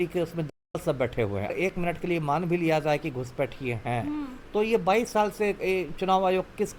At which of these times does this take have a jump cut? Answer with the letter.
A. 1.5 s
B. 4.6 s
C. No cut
A